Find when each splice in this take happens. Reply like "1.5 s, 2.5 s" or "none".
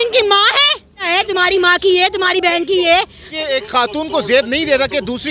1.0 s, 3.2 s